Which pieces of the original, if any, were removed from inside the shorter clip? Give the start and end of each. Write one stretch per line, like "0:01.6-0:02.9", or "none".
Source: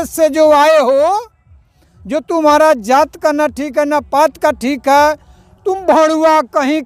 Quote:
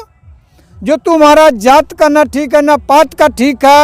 none